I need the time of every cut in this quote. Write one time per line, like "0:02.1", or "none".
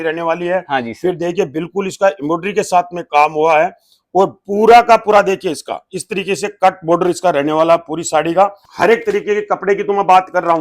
0:08.6

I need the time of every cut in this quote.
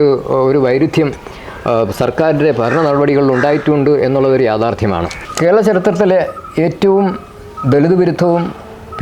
0:05.2

